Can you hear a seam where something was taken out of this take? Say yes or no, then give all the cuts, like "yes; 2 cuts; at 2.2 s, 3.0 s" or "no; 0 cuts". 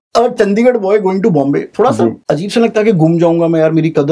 yes; 1 cut; at 2.2 s